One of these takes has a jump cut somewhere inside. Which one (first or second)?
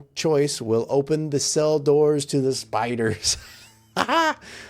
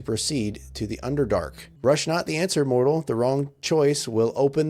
second